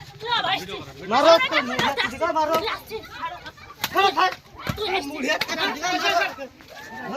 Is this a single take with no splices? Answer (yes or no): yes